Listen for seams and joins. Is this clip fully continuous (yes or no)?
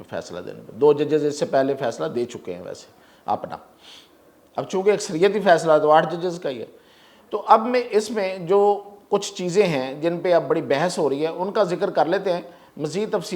yes